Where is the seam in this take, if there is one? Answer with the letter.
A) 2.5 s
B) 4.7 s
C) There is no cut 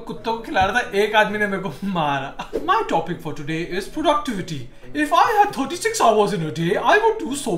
A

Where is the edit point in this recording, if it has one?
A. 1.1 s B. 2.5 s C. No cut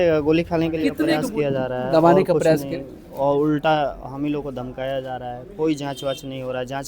A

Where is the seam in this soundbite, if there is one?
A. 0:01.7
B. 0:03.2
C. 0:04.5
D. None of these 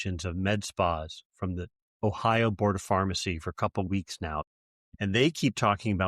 C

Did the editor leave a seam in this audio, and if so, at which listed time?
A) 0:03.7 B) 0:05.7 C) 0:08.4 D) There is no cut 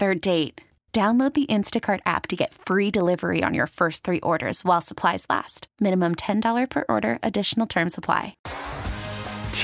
C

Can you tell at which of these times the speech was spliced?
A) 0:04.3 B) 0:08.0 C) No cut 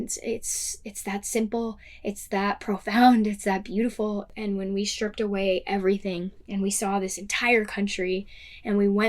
A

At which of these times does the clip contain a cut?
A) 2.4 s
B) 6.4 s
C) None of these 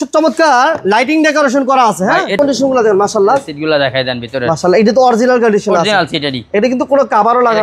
A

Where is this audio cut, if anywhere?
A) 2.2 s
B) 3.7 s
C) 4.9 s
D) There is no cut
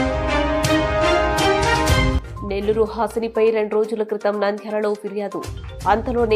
A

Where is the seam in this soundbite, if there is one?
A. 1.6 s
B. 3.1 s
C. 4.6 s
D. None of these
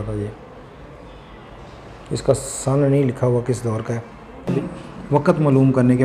C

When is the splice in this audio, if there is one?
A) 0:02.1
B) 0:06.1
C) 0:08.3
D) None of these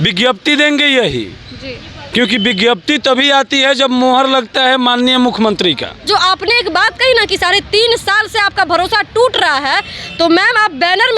B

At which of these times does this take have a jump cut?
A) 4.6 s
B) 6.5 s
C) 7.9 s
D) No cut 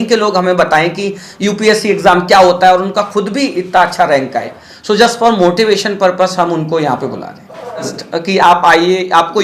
C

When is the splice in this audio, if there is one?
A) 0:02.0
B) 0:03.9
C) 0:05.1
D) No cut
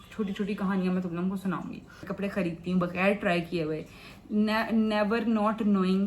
A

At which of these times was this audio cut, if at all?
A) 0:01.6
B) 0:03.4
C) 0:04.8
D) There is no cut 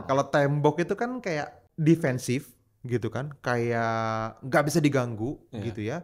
A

